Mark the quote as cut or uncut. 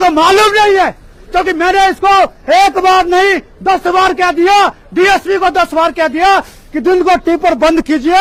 uncut